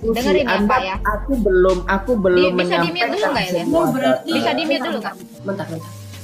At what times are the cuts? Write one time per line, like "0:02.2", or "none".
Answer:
none